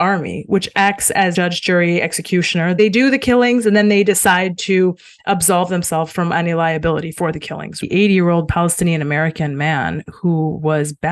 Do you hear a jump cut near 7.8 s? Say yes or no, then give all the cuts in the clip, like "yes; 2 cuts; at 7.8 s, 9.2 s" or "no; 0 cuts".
yes; 3 cuts; at 1.3 s, 2.8 s, 7.8 s